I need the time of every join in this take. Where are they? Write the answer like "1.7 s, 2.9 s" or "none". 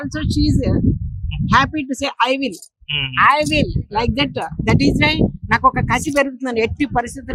none